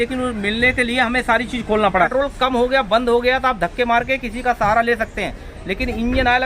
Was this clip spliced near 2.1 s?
yes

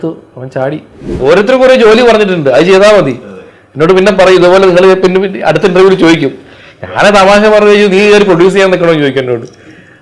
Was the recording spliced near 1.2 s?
yes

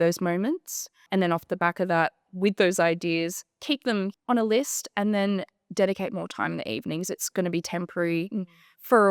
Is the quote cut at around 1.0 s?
yes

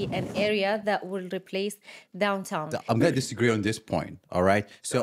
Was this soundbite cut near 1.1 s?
no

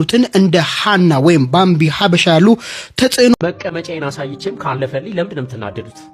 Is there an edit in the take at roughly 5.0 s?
no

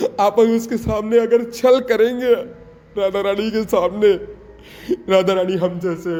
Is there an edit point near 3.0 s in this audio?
no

